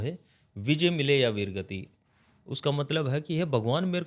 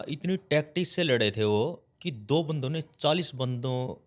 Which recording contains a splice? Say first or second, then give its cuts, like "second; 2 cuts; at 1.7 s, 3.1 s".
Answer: second; 1 cut; at 1.8 s